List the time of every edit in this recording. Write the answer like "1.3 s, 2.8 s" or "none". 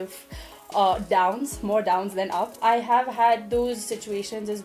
2.6 s

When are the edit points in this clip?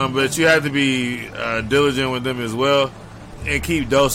none

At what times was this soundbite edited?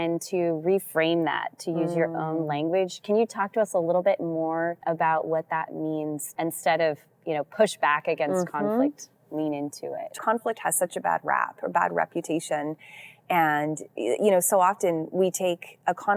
4.8 s, 6.2 s, 10.1 s

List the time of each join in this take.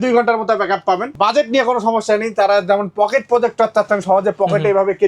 1.1 s

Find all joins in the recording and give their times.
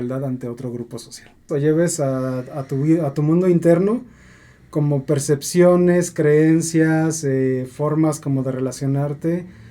1.4 s

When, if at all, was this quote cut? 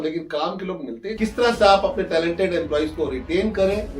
1.1 s

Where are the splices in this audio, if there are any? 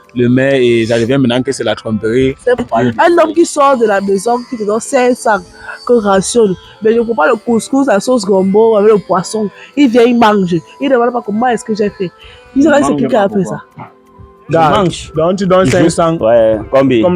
2.6 s

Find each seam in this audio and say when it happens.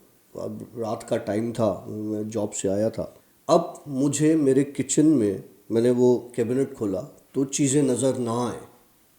3.2 s

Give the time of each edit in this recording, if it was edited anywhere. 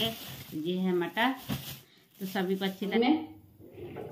2.9 s

